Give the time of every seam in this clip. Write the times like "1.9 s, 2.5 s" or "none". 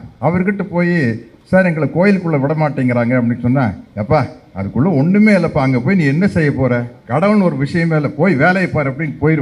none